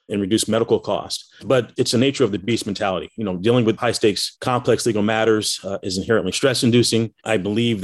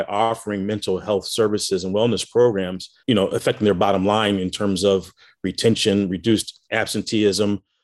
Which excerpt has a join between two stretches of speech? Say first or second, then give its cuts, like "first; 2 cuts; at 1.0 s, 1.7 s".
first; 3 cuts; at 1.7 s, 3.8 s, 6.3 s